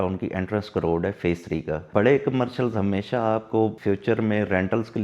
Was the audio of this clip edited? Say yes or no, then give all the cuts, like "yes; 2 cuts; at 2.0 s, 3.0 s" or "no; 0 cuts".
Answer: yes; 2 cuts; at 1.8 s, 3.8 s